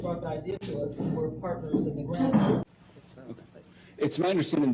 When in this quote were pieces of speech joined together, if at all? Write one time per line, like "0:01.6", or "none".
0:02.6